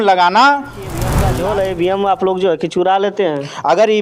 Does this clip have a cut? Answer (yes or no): yes